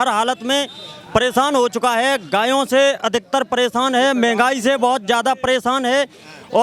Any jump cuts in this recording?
no; 0 cuts

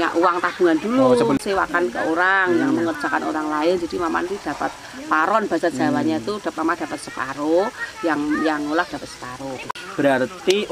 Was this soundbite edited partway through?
yes; 2 cuts; at 1.4 s, 9.7 s

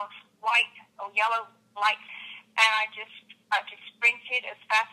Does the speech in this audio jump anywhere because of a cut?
yes; 1 cut; at 2.1 s

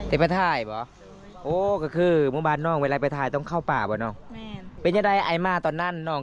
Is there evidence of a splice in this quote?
yes; 1 cut; at 4.7 s

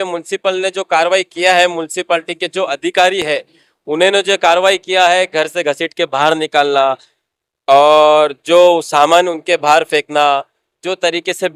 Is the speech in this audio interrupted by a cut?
no; 0 cuts

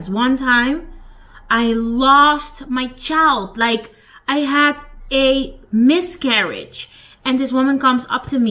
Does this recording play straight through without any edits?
yes; 0 cuts

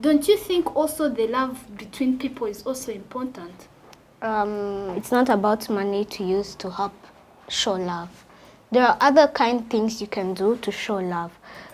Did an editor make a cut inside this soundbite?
yes; 1 cut; at 4.9 s

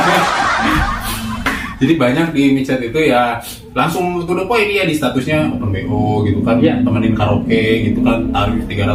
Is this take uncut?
yes; 0 cuts

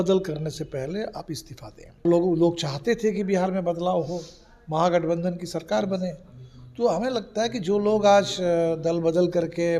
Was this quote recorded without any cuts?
no; 1 cut; at 2.1 s

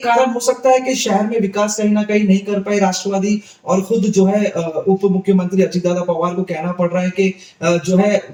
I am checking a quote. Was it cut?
no; 0 cuts

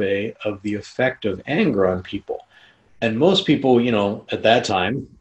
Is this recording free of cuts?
yes; 0 cuts

